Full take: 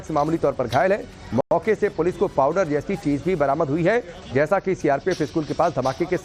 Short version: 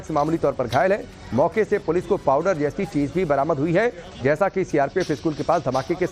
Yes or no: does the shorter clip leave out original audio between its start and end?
yes